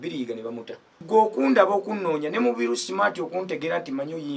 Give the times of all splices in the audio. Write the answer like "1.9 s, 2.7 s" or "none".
1.0 s